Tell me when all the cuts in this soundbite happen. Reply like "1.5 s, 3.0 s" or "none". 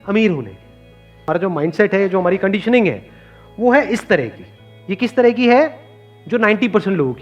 1.3 s